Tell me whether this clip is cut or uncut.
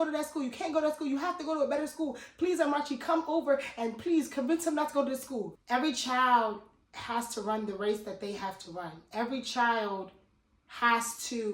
cut